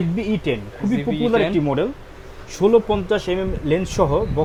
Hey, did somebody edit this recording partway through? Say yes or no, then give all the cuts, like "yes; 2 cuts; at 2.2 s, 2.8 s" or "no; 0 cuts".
no; 0 cuts